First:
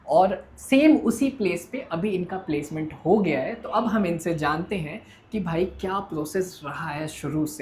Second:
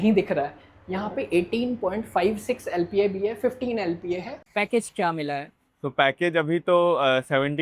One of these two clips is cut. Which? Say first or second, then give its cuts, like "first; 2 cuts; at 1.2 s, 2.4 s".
second; 1 cut; at 4.4 s